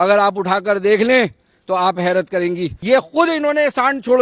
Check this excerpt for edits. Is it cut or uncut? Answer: cut